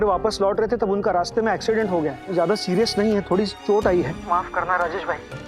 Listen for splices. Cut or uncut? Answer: cut